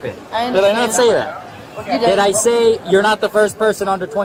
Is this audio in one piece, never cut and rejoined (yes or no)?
yes